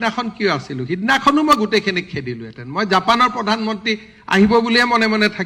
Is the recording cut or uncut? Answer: uncut